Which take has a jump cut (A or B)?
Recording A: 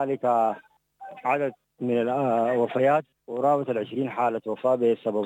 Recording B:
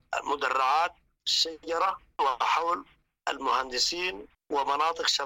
A